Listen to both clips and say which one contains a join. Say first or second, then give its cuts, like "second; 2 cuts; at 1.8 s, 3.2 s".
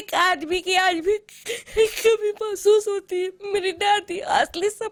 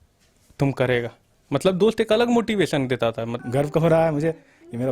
second; 1 cut; at 3.3 s